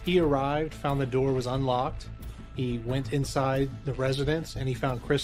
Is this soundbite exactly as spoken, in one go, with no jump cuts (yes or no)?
yes